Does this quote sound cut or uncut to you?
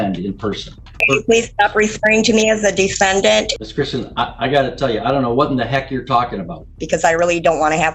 cut